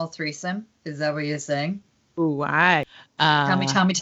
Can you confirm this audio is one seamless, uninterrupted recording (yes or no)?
no